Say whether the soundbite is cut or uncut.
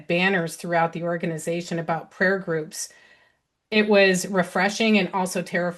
uncut